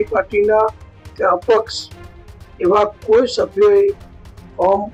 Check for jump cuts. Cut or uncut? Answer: uncut